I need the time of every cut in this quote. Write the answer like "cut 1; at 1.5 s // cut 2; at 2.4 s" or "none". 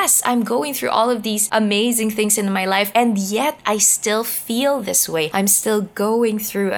cut 1; at 1.4 s // cut 2; at 2.9 s // cut 3; at 5.3 s